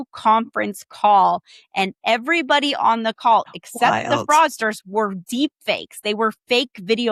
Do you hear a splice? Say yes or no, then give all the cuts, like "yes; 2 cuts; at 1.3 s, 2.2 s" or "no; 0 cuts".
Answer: no; 0 cuts